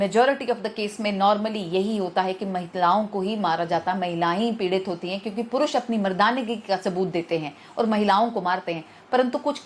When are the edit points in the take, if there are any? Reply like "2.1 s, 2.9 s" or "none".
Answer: none